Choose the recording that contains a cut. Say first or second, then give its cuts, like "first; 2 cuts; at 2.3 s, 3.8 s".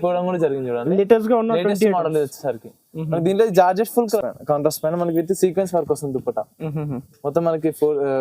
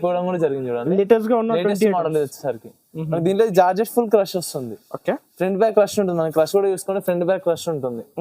first; 1 cut; at 4.2 s